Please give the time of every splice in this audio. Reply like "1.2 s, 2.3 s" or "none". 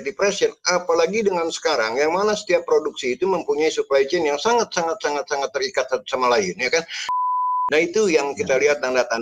7.1 s